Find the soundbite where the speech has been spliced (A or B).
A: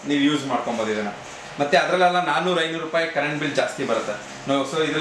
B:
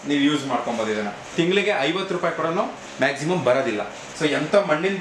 B